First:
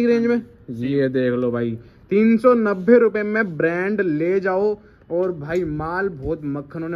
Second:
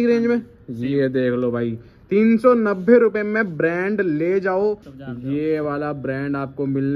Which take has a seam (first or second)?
second